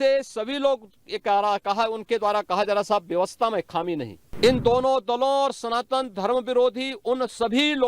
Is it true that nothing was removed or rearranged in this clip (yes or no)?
no